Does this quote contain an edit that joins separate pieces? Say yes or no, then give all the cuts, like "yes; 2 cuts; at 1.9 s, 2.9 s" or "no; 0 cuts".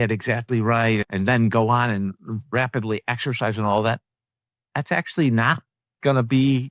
yes; 1 cut; at 1.1 s